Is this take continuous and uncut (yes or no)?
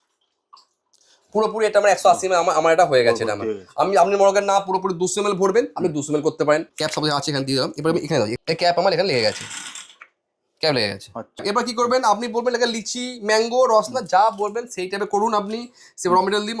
no